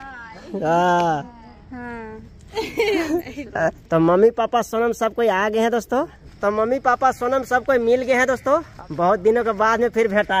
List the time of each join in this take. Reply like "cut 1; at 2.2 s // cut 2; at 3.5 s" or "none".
cut 1; at 1.6 s // cut 2; at 3.8 s // cut 3; at 6.2 s // cut 4; at 8.8 s